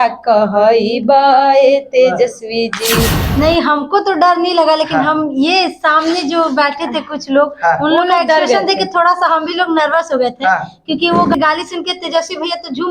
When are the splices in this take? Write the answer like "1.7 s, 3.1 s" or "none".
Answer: 3.2 s, 11.3 s